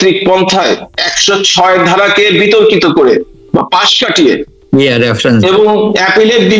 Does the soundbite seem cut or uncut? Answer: uncut